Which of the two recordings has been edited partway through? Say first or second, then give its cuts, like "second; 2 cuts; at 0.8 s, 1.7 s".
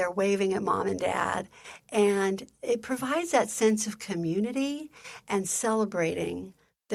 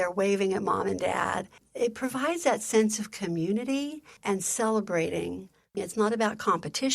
second; 3 cuts; at 1.6 s, 4.1 s, 5.8 s